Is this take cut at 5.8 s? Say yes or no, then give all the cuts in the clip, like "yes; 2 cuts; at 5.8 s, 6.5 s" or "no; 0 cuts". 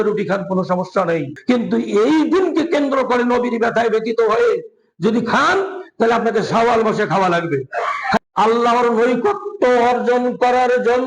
no; 1 cut; at 8.2 s